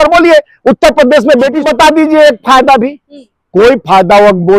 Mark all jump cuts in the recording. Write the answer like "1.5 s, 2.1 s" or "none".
1.6 s